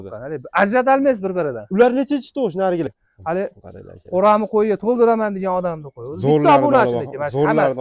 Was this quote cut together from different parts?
yes; 1 cut; at 3.0 s

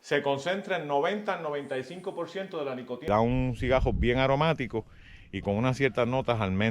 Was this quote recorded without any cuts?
no; 1 cut; at 3.1 s

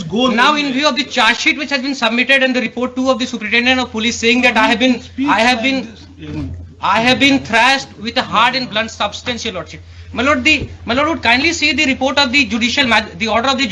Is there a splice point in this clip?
no; 0 cuts

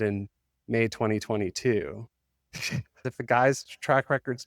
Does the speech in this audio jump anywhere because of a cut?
yes; 1 cut; at 3.1 s

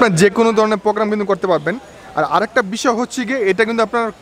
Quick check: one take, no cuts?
yes; 0 cuts

